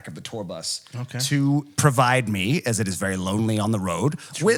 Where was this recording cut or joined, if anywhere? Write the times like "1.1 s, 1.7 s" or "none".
none